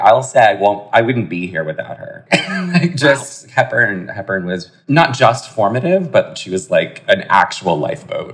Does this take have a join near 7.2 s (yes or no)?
no